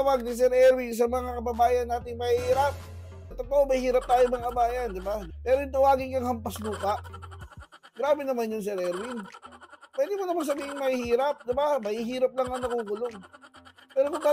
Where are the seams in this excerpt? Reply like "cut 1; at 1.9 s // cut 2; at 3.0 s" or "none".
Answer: cut 1; at 3.4 s // cut 2; at 5.3 s